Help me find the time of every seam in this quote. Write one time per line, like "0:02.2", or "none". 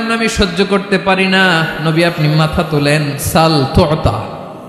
none

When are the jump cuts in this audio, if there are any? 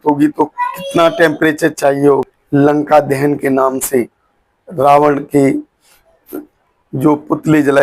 0:02.4

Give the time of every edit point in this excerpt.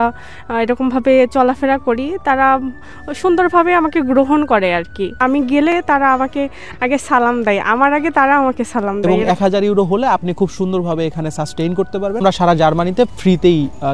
0:05.2
0:09.0
0:12.2

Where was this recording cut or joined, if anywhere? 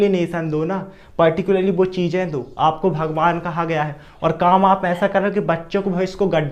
none

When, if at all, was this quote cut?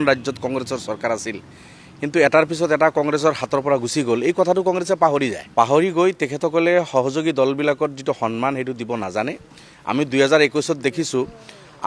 0:05.4

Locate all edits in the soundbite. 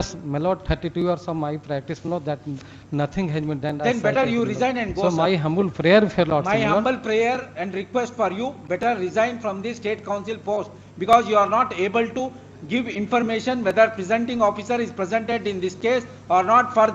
none

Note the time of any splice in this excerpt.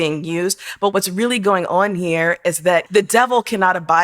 0:00.9
0:02.9

